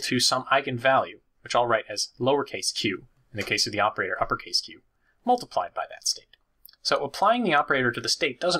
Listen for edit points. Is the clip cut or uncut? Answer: uncut